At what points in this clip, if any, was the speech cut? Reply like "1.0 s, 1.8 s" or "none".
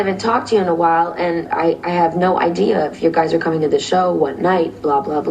1.5 s